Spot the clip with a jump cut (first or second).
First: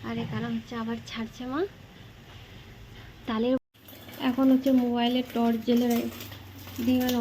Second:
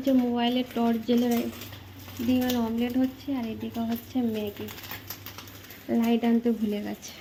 first